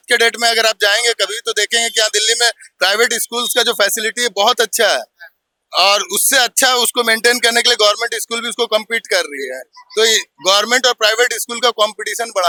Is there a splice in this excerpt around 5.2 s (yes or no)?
no